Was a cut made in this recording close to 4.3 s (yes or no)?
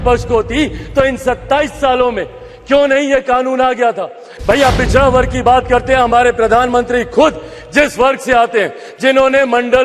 yes